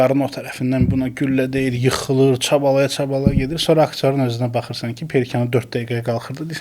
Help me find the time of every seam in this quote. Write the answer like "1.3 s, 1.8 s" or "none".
none